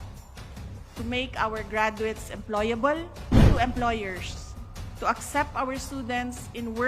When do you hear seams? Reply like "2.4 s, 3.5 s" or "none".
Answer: 3.5 s